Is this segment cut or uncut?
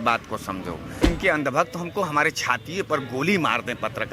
cut